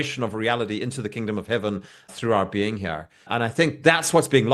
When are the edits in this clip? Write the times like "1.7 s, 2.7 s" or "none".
2.1 s, 3.3 s